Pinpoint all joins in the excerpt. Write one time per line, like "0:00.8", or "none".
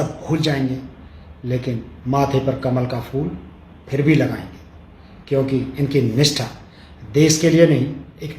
none